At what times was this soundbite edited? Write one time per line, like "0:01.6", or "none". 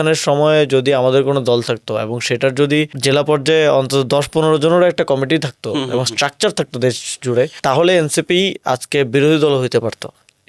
0:02.9
0:07.5